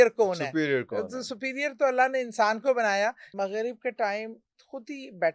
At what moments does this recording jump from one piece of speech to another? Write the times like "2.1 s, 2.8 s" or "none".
3.3 s